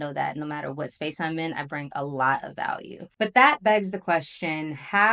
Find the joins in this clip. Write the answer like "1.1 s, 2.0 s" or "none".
3.0 s